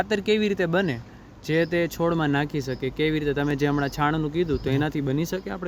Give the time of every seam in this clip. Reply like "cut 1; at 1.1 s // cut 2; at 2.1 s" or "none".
none